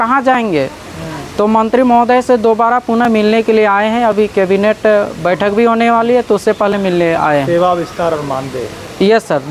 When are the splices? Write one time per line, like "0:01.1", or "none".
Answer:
none